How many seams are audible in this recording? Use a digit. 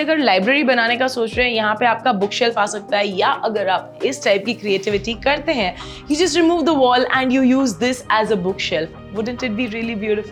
0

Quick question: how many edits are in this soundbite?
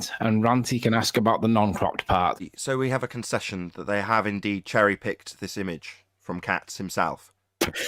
1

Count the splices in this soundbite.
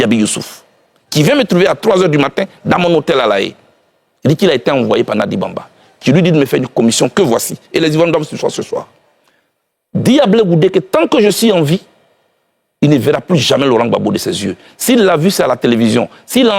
0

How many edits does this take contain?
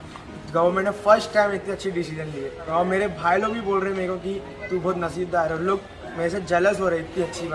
0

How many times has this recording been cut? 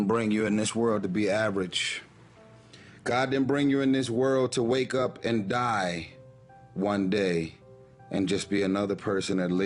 0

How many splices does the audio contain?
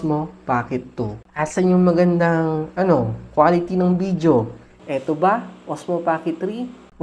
1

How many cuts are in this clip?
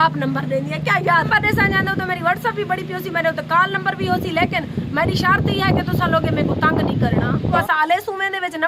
2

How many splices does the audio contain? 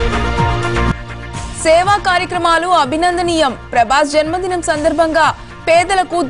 0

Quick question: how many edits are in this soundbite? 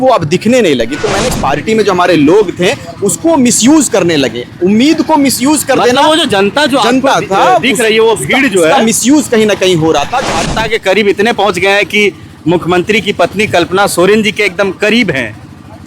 2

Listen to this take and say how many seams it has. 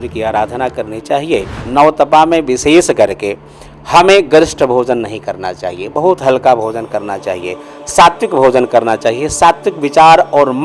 1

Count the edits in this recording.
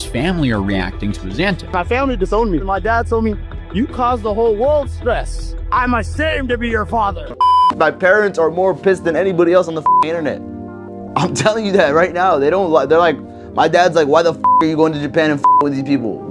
2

